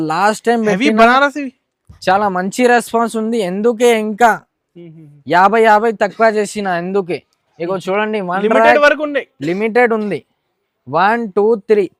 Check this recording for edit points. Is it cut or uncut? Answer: uncut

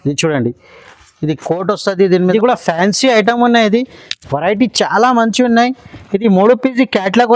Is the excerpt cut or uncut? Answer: cut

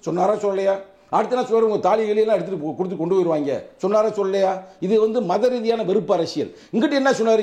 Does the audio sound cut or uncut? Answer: uncut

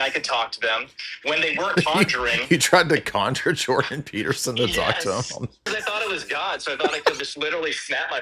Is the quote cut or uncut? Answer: cut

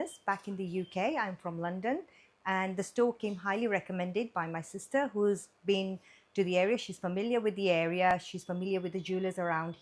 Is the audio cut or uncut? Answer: uncut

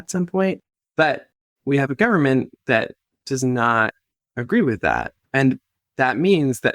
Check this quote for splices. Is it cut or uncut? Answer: cut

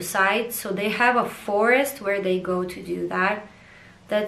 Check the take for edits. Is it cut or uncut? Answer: uncut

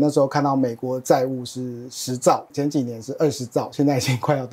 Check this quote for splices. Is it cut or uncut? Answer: uncut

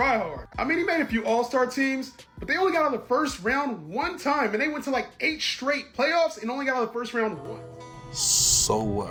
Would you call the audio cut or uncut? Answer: uncut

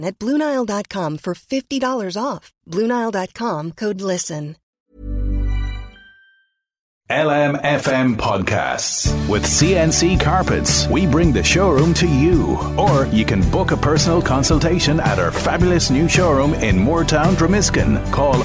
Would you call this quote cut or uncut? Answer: cut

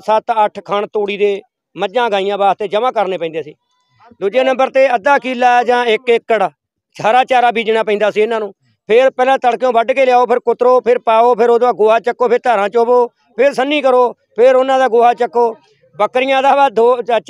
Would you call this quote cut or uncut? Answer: uncut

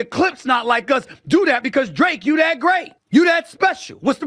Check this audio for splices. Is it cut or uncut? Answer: cut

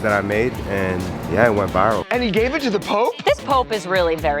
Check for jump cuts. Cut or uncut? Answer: cut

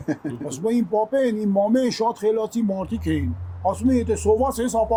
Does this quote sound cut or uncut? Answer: uncut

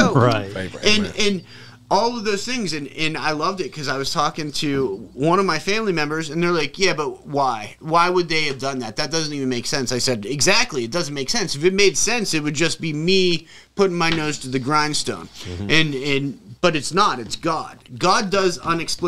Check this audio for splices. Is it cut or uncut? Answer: uncut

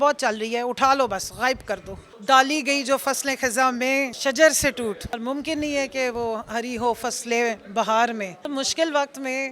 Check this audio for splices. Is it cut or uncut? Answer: cut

